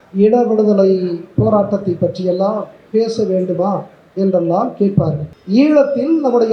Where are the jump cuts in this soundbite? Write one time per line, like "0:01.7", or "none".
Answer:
0:05.3